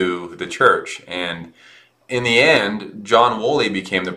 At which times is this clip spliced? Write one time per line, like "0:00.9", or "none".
0:02.0